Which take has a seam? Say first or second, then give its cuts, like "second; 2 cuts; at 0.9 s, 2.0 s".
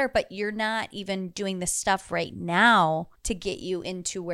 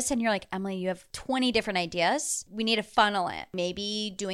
second; 3 cuts; at 1.1 s, 2.4 s, 3.5 s